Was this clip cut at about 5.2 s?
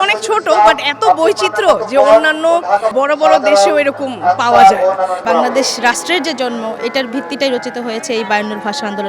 yes; 2 cuts; at 2.9 s, 5.2 s

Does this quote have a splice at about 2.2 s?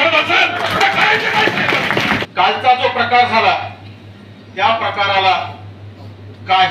yes; 1 cut; at 2.2 s

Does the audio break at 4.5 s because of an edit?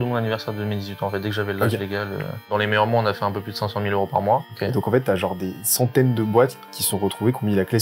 yes; 2 cuts; at 2.5 s, 4.5 s

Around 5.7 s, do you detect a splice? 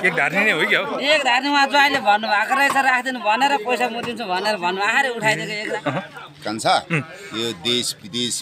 yes; 1 cut; at 5.7 s

